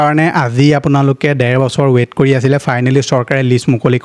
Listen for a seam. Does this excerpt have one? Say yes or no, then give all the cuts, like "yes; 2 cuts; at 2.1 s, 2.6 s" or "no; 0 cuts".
no; 0 cuts